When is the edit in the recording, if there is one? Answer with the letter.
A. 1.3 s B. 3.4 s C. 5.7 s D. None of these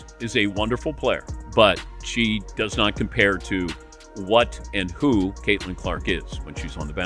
A